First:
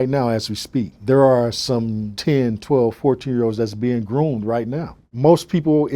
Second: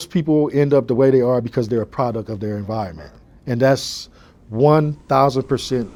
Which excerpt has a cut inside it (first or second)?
first